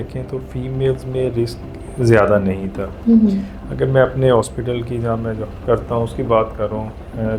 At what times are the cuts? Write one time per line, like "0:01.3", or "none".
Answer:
none